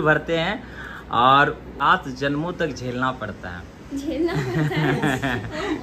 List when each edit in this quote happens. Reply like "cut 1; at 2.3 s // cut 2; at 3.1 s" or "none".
cut 1; at 1.7 s